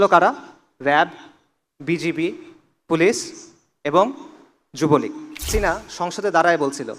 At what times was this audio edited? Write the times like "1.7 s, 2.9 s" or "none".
5.5 s